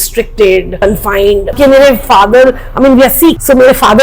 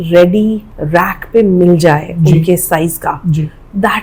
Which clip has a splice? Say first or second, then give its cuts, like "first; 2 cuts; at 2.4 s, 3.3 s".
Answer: first; 1 cut; at 1.6 s